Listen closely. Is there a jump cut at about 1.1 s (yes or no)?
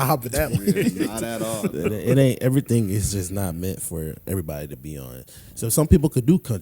no